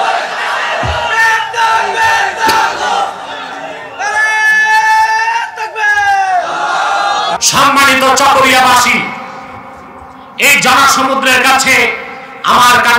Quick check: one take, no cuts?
no; 1 cut; at 7.4 s

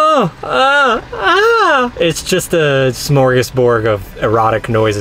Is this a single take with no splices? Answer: no; 2 cuts; at 3.0 s, 4.1 s

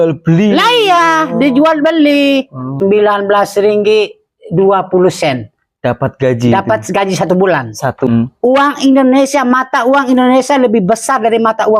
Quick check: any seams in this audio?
yes; 2 cuts; at 2.7 s, 8.1 s

